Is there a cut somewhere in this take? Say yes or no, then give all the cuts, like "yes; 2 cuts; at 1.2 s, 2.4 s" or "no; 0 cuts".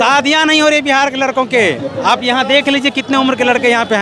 no; 0 cuts